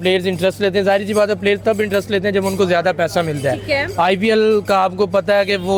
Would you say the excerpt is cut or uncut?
uncut